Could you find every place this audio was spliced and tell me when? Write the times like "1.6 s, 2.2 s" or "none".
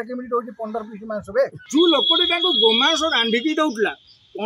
1.6 s